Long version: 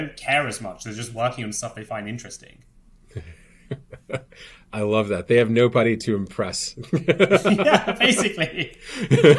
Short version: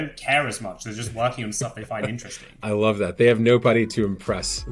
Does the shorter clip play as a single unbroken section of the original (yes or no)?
no